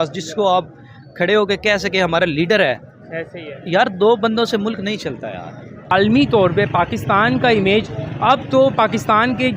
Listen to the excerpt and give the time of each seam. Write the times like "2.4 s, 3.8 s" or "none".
5.9 s

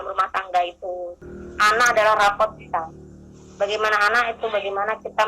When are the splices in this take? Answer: 1.2 s

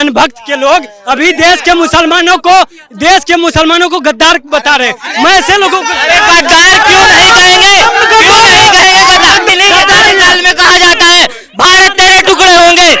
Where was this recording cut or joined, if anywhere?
9.5 s

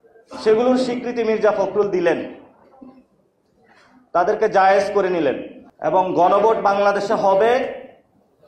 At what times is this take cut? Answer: 5.6 s

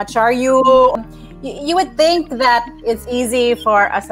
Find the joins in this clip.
0.9 s

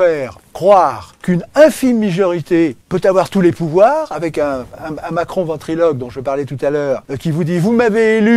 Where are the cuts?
1.1 s, 2.8 s, 7.1 s

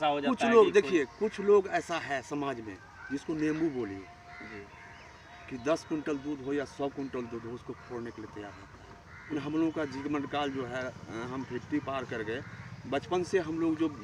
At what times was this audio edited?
9.3 s

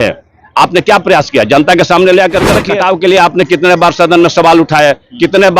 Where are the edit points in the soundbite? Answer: 2.6 s

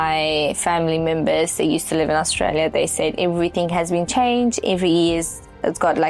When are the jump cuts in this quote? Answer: none

